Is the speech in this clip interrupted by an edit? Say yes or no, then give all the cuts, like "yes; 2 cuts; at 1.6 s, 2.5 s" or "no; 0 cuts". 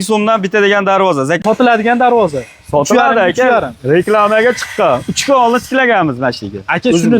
yes; 1 cut; at 1.4 s